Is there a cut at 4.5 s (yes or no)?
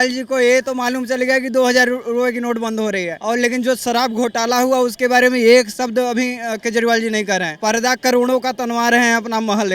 no